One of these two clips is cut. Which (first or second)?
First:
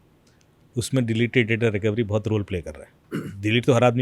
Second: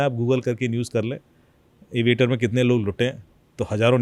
first